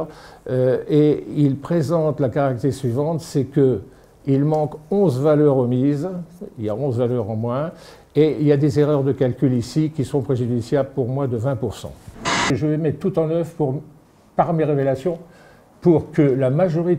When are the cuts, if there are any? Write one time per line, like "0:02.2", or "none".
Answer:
0:12.5